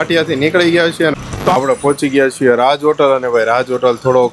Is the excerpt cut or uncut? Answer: cut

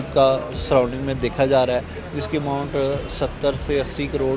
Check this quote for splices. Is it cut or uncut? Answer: uncut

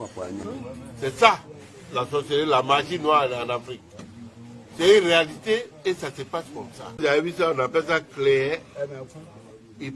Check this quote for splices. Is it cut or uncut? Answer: cut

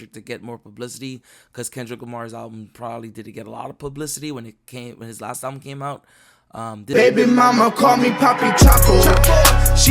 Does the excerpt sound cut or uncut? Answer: cut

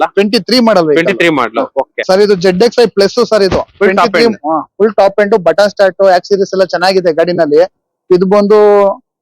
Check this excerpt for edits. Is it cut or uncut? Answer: cut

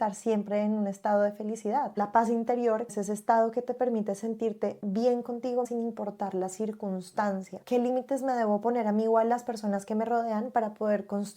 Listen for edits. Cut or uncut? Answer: cut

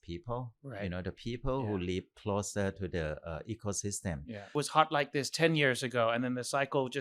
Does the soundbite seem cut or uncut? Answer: cut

